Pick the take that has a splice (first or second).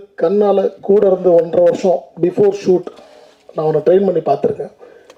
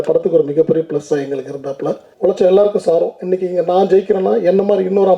second